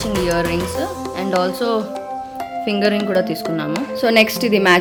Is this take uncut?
yes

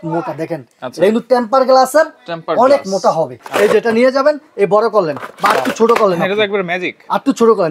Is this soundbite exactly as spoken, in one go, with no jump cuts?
no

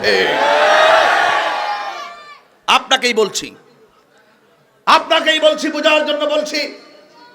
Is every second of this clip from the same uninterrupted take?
yes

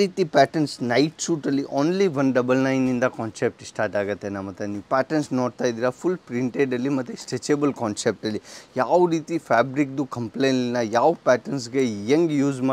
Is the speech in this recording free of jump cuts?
yes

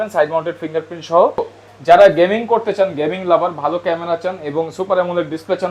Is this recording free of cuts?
no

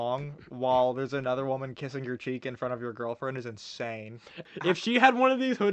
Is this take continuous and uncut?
no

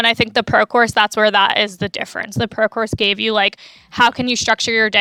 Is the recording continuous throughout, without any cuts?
yes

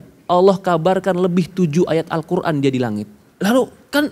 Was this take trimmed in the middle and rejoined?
yes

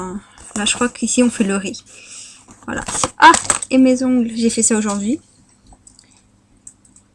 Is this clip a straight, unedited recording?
yes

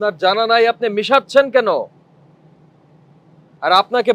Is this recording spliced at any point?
no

